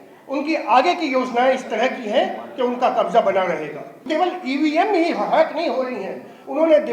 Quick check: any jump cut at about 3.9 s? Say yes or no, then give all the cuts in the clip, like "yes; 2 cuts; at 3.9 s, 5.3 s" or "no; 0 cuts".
yes; 1 cut; at 3.9 s